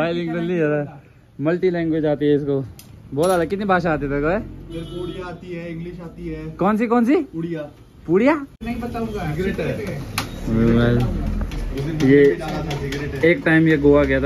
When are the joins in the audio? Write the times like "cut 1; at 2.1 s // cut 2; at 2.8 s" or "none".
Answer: cut 1; at 8.6 s